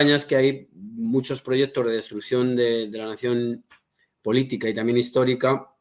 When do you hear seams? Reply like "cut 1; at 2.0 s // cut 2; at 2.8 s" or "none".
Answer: none